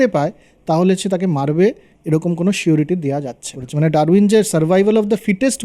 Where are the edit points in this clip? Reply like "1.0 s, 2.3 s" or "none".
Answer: 3.6 s